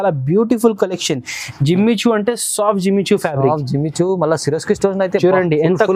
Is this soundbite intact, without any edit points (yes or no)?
yes